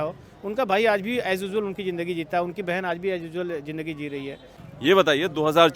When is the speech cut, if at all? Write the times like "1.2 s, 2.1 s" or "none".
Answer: 4.7 s